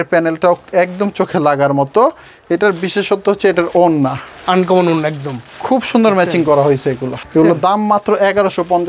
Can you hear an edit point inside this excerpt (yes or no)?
no